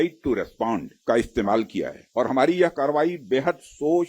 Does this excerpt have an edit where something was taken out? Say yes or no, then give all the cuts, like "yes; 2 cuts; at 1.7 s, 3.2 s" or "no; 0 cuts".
yes; 2 cuts; at 0.9 s, 2.0 s